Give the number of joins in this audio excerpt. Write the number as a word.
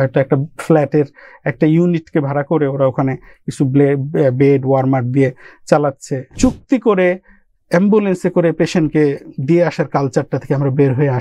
one